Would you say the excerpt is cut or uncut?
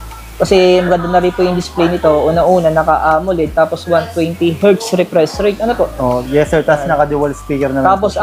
uncut